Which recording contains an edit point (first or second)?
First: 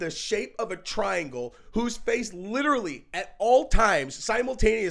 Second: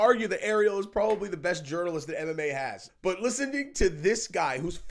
second